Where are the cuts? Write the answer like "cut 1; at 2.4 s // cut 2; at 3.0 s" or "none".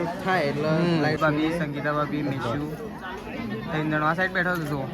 cut 1; at 1.2 s